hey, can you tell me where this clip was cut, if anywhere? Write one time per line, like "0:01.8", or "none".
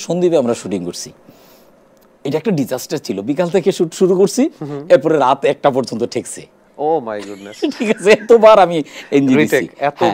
none